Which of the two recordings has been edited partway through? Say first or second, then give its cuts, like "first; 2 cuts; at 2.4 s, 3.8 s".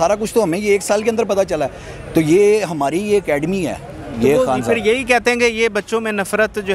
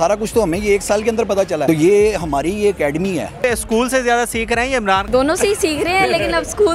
second; 3 cuts; at 1.6 s, 3.4 s, 5.1 s